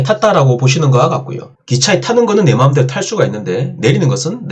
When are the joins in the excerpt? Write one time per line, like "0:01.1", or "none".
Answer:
none